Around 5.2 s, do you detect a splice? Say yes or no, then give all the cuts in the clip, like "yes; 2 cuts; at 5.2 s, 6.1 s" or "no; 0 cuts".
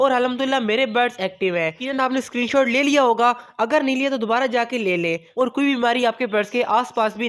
yes; 2 cuts; at 1.8 s, 5.2 s